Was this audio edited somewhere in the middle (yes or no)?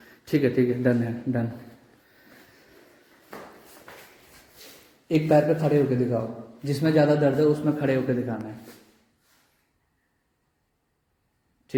no